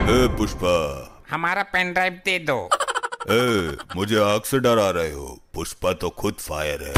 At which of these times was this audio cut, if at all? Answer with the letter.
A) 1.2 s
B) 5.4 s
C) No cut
A